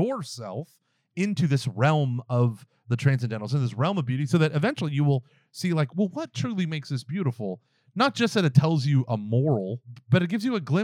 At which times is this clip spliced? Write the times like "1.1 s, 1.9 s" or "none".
9.9 s